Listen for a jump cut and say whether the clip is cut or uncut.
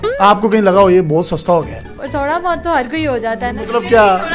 cut